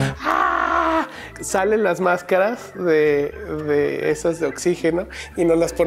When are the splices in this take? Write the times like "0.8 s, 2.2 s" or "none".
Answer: none